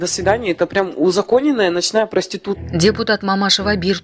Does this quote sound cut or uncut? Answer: cut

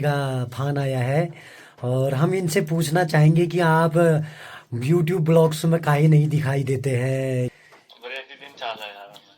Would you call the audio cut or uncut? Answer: cut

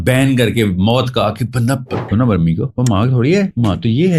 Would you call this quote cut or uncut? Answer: cut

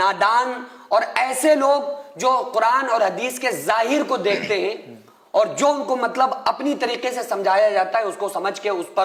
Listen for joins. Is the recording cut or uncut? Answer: uncut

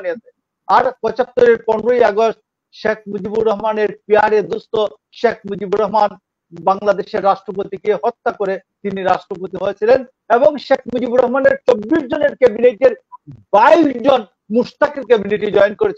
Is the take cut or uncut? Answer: uncut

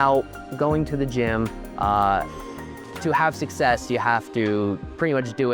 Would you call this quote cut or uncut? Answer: uncut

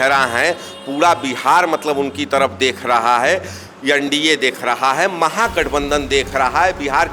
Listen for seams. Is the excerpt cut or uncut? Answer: uncut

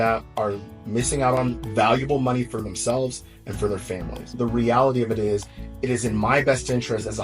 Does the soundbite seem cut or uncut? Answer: cut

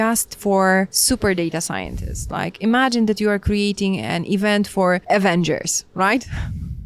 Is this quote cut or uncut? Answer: cut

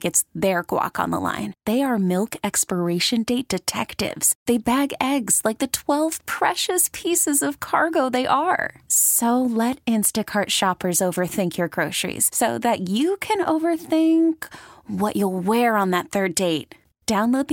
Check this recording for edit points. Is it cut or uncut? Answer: uncut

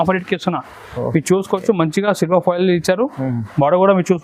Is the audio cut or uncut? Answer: uncut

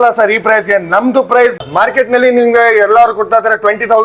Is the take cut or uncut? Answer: cut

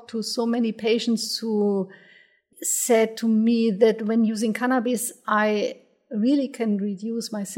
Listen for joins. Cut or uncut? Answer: cut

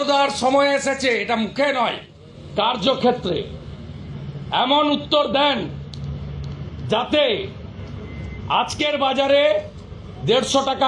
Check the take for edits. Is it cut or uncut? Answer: uncut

